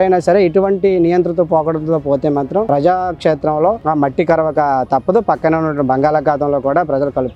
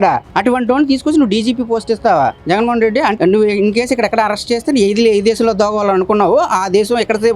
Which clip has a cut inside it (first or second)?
second